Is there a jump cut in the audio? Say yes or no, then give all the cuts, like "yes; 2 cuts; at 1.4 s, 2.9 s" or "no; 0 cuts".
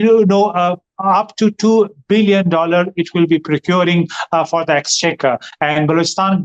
no; 0 cuts